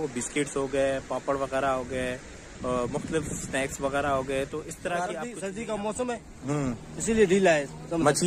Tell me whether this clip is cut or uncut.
cut